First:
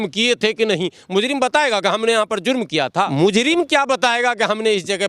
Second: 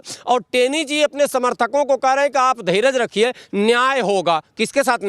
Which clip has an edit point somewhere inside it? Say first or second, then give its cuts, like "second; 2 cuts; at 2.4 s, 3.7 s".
first; 1 cut; at 3.1 s